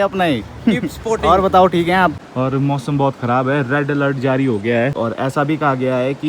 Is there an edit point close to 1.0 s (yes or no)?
no